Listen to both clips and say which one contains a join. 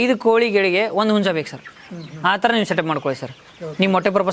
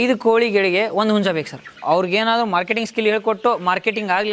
second; 1 cut; at 1.7 s

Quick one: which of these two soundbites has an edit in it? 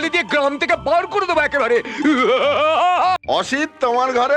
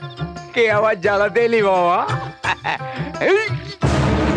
first; 1 cut; at 3.2 s

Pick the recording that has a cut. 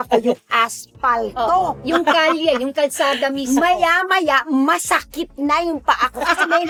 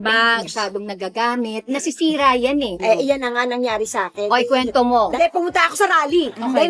second; 2 cuts; at 2.8 s, 5.1 s

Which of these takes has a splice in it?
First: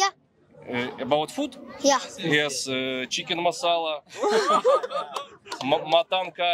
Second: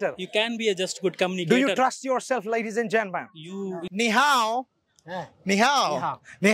second; 1 cut; at 3.8 s

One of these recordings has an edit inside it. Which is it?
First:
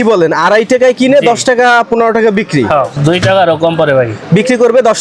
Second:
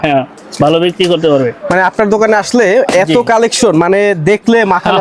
first; 1 cut; at 2.9 s

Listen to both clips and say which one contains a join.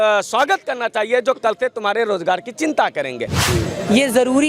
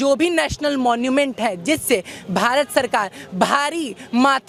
first; 1 cut; at 3.4 s

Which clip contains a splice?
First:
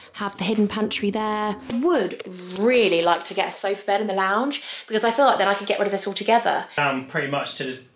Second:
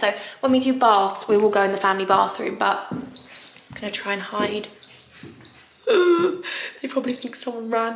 first; 2 cuts; at 1.7 s, 6.7 s

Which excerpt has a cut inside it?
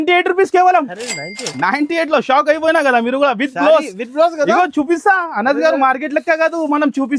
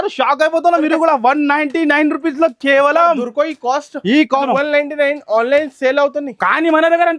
second; 1 cut; at 4.4 s

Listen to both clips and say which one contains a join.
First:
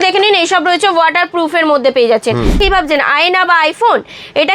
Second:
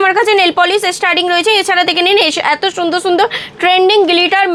first; 1 cut; at 2.6 s

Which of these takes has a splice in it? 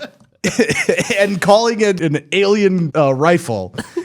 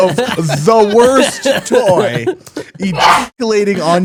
first; 2 cuts; at 2.0 s, 2.9 s

